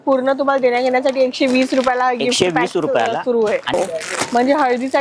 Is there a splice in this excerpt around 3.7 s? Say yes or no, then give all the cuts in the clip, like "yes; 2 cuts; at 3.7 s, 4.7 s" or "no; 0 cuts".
yes; 1 cut; at 3.7 s